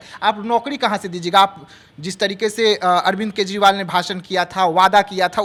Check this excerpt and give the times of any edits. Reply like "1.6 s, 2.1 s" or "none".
none